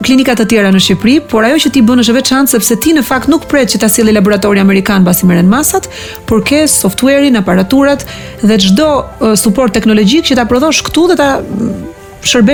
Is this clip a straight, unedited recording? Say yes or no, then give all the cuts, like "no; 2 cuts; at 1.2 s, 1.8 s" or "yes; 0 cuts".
yes; 0 cuts